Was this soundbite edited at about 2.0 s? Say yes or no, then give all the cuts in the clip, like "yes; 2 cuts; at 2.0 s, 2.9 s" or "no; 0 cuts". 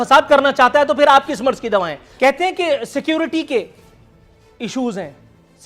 yes; 1 cut; at 2.0 s